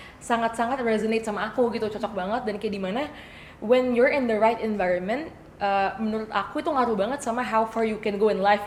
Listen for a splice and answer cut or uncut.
uncut